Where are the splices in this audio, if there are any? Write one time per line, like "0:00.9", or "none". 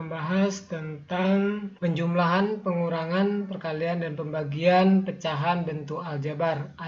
0:01.7